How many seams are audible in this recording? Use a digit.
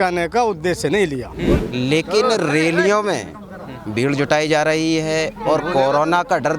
1